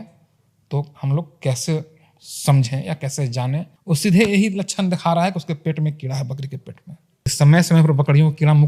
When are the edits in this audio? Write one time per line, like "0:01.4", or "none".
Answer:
0:03.7
0:07.3